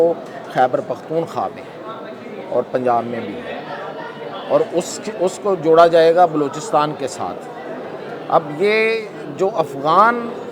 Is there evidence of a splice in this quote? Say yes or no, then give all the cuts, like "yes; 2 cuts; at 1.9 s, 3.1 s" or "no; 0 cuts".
no; 0 cuts